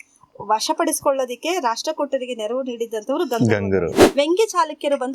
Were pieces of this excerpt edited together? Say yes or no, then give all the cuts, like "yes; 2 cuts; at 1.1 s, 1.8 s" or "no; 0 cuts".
yes; 1 cut; at 4.0 s